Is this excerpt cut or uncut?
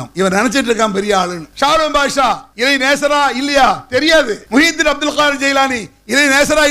cut